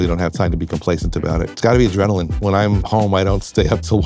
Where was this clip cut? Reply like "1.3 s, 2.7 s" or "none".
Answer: 1.5 s, 2.3 s